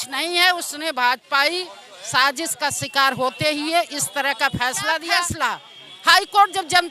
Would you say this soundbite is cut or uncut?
cut